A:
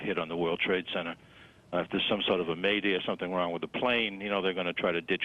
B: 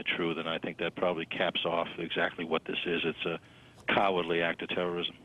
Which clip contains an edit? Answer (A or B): A